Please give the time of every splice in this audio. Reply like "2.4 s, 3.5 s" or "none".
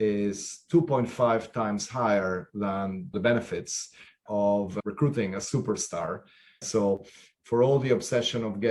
3.1 s, 4.8 s, 6.6 s